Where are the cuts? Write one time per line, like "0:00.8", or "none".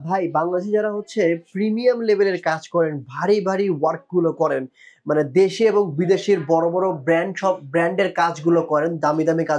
none